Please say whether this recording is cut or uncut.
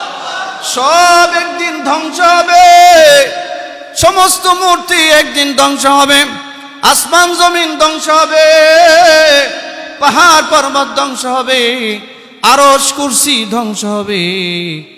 uncut